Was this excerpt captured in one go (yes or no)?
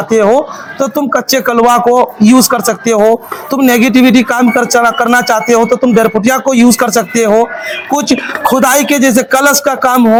yes